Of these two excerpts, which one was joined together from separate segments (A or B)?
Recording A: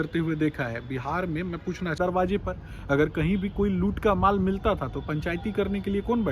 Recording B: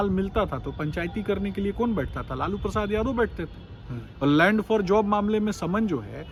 A